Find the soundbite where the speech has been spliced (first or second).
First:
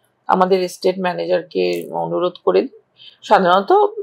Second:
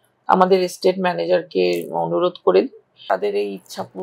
second